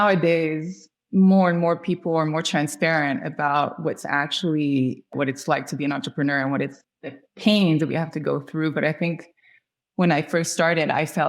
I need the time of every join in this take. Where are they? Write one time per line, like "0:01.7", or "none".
0:05.1
0:06.9